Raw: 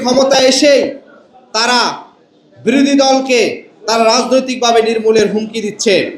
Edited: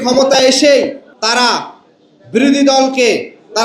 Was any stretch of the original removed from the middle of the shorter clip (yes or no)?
yes